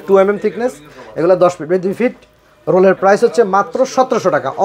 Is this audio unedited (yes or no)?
yes